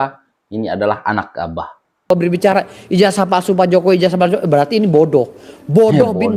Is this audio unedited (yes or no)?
no